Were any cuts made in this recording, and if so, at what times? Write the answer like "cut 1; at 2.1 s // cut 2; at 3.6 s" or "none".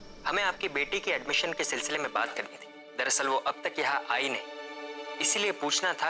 cut 1; at 2.4 s